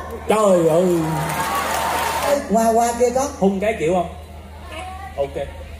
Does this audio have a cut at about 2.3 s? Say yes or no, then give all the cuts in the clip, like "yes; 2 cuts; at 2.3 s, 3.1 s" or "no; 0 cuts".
yes; 1 cut; at 2.3 s